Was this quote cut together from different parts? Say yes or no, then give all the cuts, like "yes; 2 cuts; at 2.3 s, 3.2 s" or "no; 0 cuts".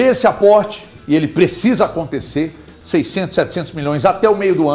no; 0 cuts